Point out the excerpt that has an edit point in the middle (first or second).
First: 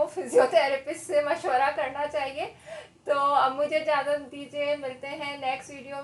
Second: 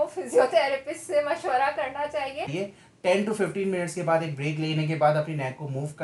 second